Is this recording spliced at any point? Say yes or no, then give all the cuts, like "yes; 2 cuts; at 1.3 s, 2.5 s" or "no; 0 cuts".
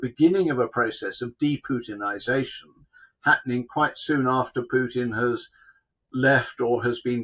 no; 0 cuts